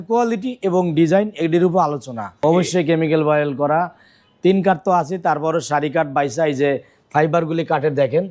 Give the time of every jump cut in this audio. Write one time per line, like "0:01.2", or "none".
0:02.4

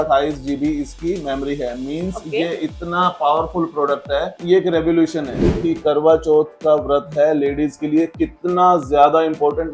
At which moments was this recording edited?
0:05.5

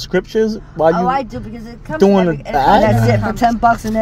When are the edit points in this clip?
0:02.8

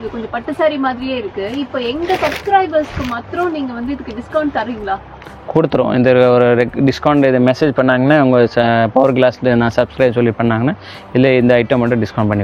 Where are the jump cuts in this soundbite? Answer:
none

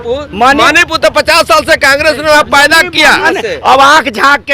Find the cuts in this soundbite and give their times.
0:03.3

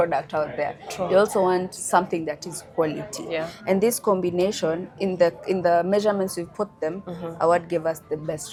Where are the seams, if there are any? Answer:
none

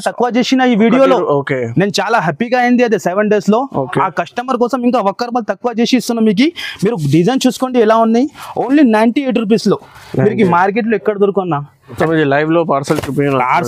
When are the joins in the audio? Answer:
0:11.9

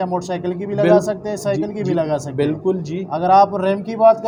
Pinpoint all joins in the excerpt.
none

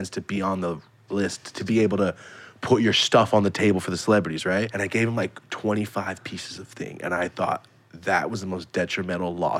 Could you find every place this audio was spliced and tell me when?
0:01.5
0:04.8

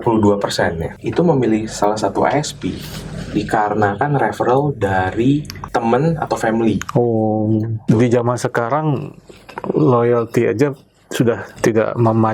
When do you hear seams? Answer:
0:00.8
0:05.6
0:07.8
0:11.5

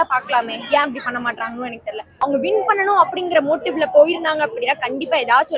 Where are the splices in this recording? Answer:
0:02.1

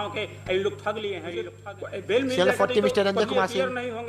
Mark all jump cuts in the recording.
0:01.1

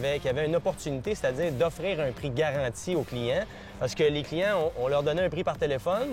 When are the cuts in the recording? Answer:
none

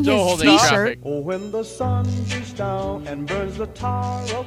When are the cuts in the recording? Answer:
0:01.0

